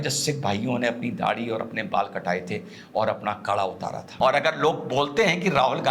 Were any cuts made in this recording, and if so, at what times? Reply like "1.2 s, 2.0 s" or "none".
4.1 s